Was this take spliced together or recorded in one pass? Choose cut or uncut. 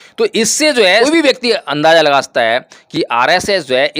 cut